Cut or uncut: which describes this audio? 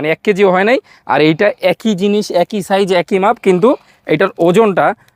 uncut